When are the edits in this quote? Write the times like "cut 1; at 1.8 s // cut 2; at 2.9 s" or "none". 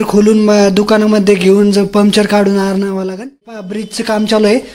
cut 1; at 3.8 s